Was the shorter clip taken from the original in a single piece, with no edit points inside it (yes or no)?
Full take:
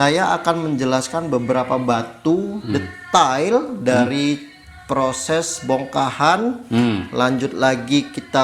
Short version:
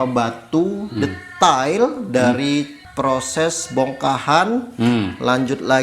no